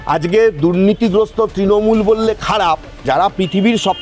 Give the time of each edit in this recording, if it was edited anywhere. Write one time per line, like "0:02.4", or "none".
0:03.0